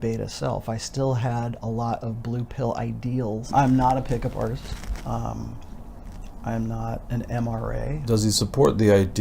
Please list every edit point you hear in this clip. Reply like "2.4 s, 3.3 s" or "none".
3.5 s, 8.0 s